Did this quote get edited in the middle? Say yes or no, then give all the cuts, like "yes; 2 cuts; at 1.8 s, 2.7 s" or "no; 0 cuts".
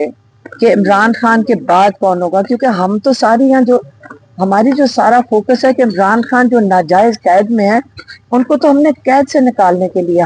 no; 0 cuts